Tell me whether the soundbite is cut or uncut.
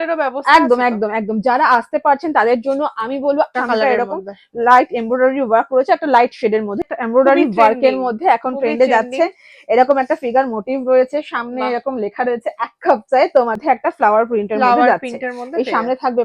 cut